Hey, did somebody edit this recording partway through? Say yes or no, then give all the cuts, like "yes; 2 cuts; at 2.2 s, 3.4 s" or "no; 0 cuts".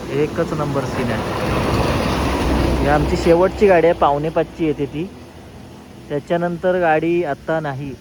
no; 0 cuts